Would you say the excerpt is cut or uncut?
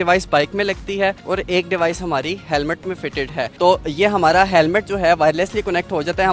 uncut